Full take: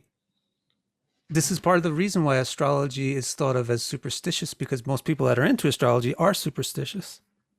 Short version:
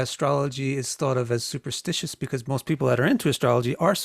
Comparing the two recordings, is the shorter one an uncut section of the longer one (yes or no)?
yes